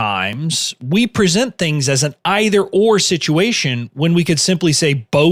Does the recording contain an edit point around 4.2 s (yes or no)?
no